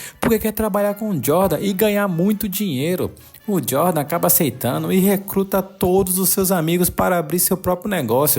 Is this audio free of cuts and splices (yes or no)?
yes